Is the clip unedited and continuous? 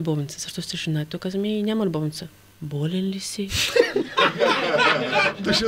yes; 0 cuts

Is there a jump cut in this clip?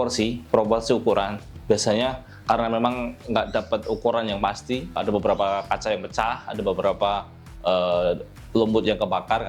yes; 1 cut; at 5.0 s

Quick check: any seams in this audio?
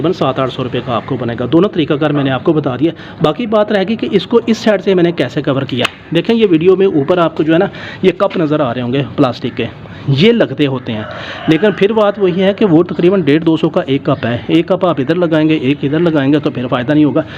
no; 0 cuts

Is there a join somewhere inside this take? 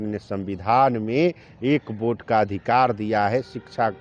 no; 0 cuts

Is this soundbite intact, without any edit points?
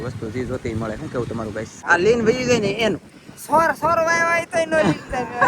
no; 1 cut; at 1.7 s

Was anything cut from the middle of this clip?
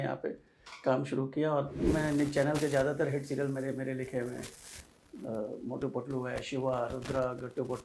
yes; 1 cut; at 1.9 s

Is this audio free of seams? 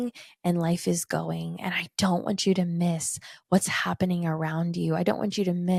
yes; 0 cuts

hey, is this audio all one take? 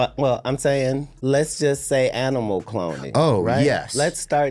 no; 1 cut; at 1.1 s

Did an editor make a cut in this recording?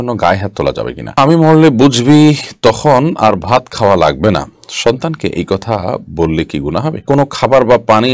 yes; 2 cuts; at 1.2 s, 7.0 s

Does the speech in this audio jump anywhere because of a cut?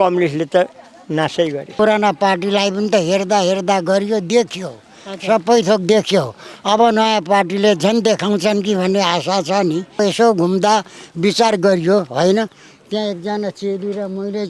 yes; 2 cuts; at 1.7 s, 10.0 s

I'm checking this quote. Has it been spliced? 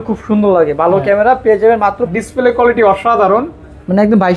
yes; 1 cut; at 2.1 s

